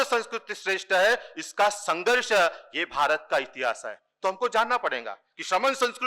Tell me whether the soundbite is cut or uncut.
uncut